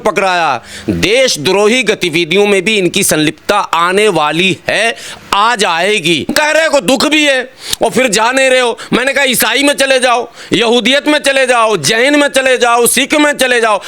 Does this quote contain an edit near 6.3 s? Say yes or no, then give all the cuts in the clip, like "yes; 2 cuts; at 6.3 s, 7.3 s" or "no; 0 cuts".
yes; 1 cut; at 6.3 s